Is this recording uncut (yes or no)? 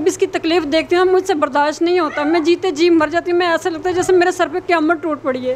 yes